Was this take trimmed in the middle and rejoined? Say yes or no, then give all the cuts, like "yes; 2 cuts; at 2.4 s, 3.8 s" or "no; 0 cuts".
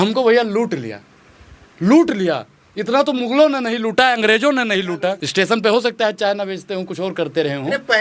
no; 0 cuts